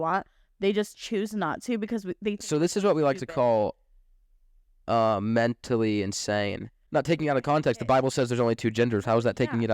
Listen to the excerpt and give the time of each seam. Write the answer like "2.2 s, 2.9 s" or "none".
6.7 s